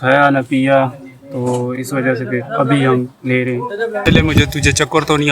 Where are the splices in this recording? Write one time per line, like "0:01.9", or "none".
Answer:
0:04.0